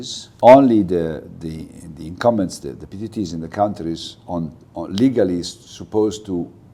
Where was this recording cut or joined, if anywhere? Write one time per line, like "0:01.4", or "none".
none